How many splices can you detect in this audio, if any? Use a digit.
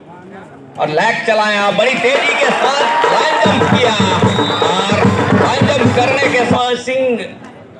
1